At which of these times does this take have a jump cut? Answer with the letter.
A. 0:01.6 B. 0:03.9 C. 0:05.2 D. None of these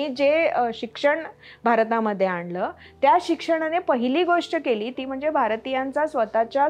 D